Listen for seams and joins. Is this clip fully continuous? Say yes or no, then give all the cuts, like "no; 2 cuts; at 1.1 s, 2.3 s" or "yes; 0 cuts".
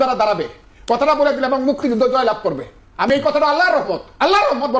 yes; 0 cuts